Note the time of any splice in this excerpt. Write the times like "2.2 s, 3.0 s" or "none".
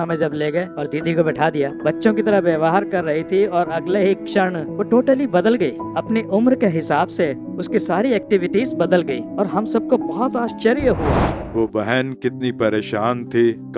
1.8 s, 11.3 s